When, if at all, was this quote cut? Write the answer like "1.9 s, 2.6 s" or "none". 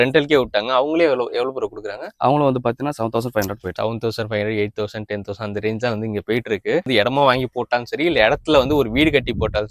3.8 s, 6.9 s